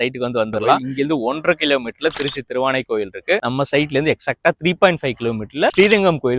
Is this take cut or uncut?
cut